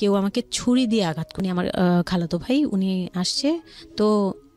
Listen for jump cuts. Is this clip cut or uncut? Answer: cut